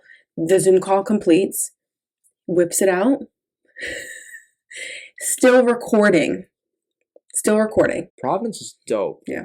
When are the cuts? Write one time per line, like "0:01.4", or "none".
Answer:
0:08.1